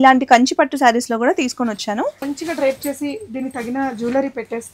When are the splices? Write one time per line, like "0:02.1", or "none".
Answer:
0:02.2